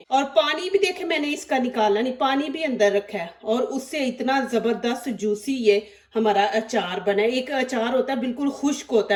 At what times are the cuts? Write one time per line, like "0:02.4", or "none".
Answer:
none